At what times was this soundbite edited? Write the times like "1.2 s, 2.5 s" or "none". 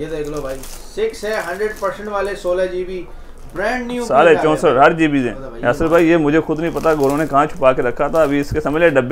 5.4 s

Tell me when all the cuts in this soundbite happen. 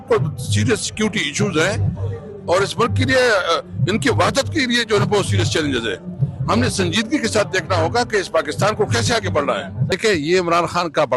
9.9 s

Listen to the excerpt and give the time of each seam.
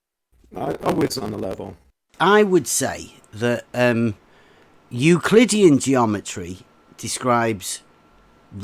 2.0 s

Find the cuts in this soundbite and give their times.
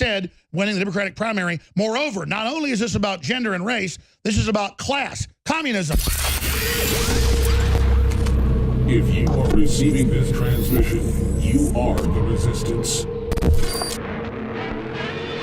5.9 s

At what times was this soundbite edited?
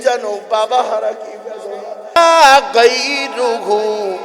2.2 s

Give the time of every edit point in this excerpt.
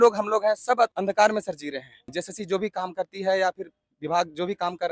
1.0 s, 2.0 s

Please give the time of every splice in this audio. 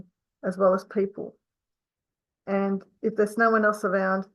none

